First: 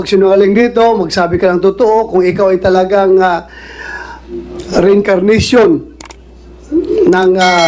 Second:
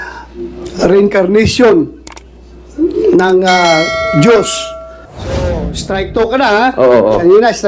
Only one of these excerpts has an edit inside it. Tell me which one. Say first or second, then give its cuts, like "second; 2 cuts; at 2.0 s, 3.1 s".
second; 1 cut; at 5.4 s